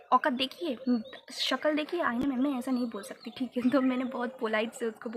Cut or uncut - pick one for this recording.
uncut